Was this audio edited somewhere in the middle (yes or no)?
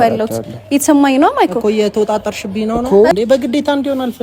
yes